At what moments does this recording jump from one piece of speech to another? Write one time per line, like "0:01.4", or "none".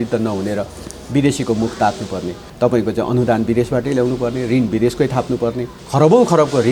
0:02.4
0:05.7